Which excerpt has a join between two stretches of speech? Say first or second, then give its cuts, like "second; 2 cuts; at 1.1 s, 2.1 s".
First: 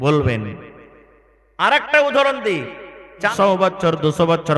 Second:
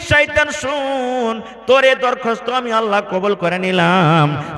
first; 1 cut; at 3.3 s